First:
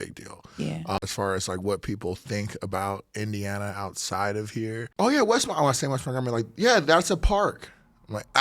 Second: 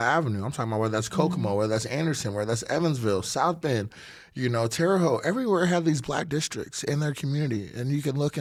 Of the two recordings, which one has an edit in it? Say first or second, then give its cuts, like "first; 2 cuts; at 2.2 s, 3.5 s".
first; 2 cuts; at 1.0 s, 4.9 s